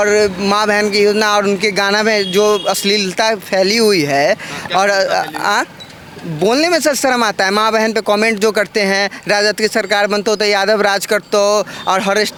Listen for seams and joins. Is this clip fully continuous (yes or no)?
yes